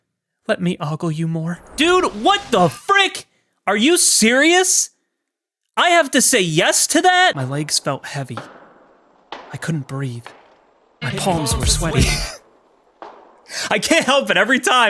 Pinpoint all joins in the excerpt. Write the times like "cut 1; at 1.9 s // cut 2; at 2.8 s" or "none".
cut 1; at 1.6 s // cut 2; at 7.4 s